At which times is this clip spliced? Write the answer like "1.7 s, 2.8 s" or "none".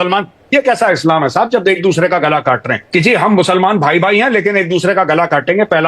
2.8 s